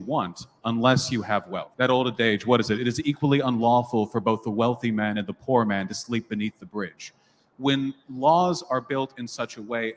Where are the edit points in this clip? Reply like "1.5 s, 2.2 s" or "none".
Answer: 1.6 s